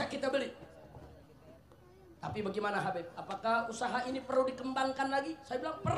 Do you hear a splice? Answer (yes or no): no